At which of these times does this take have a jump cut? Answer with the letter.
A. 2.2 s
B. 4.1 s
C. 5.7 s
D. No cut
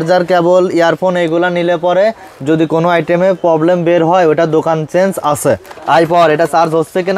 C